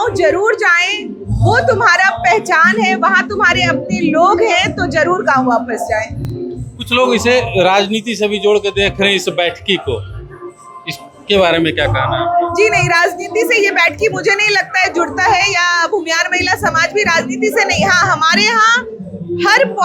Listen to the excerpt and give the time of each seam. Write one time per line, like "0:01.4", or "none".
none